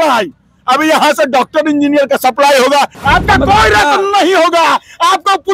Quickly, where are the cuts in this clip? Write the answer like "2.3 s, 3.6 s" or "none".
3.0 s